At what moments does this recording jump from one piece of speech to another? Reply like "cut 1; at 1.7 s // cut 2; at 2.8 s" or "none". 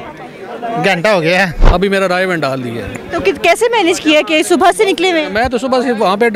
cut 1; at 1.6 s